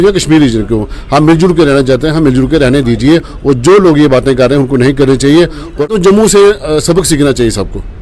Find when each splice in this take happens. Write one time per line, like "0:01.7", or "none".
0:05.9